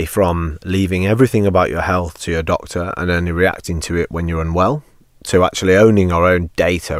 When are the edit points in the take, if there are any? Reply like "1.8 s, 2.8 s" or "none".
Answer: none